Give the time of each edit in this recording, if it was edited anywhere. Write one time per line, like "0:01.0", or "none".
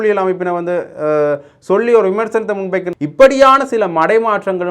0:02.9